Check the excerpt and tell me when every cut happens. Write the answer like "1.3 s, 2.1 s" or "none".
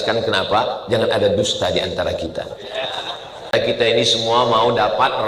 3.5 s